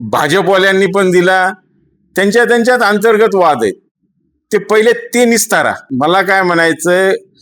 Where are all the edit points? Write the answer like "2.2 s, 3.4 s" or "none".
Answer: 5.9 s